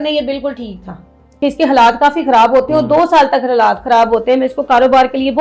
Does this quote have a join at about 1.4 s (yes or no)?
yes